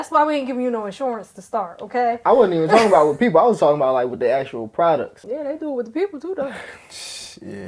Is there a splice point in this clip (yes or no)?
yes